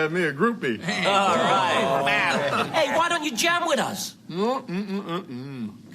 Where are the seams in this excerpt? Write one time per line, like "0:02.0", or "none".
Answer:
0:02.1